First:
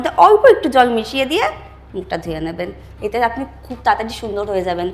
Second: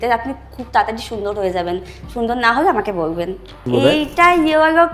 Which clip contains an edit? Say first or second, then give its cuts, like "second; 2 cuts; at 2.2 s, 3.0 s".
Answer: second; 1 cut; at 3.6 s